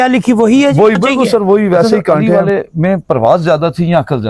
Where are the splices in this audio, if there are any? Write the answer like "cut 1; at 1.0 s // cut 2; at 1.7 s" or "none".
cut 1; at 2.3 s